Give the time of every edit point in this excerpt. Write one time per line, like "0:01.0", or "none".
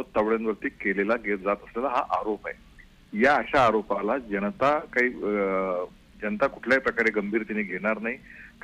none